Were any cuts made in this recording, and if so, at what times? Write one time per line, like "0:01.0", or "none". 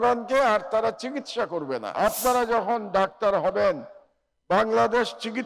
0:01.9